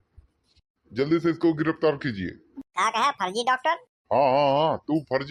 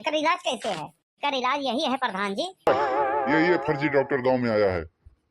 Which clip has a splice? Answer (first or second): second